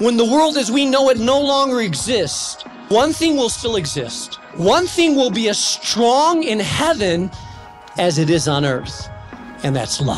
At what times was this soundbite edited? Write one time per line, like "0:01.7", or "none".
0:02.9
0:04.5
0:07.9

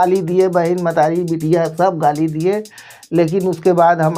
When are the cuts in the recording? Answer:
none

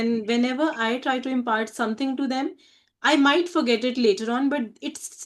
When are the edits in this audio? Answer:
none

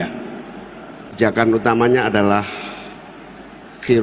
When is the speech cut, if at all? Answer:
0:01.2

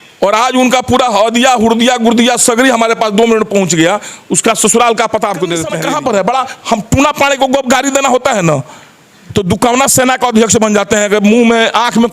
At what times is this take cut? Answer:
0:05.7

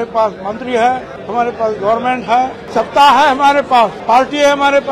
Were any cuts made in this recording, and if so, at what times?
0:01.1
0:02.6
0:04.0

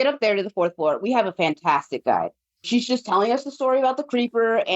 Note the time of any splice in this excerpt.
0:02.4

